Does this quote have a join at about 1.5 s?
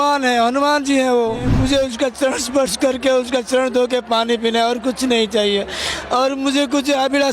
yes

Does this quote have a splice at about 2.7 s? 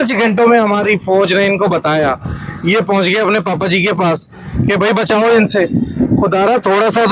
no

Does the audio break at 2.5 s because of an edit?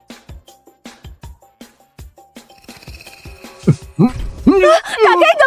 yes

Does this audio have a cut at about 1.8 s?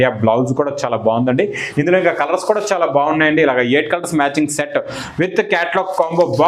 no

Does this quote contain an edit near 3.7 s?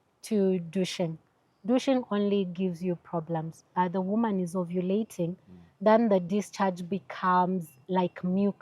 yes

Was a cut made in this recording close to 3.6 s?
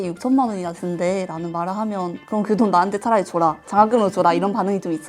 no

